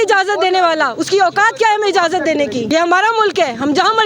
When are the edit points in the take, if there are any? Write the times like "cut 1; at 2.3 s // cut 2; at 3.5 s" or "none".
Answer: cut 1; at 2.6 s